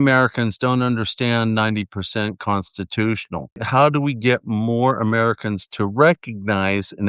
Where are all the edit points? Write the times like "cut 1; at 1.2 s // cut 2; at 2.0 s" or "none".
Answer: cut 1; at 3.6 s